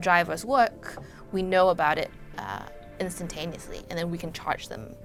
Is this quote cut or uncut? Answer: uncut